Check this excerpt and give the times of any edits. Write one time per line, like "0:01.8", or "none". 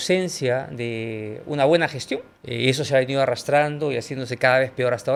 none

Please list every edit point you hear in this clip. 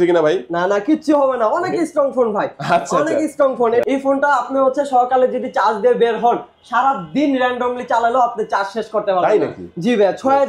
0:03.8

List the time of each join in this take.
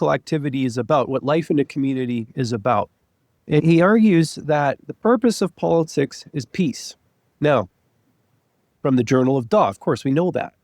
none

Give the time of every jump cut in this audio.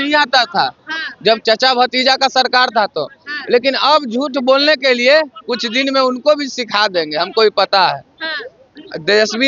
none

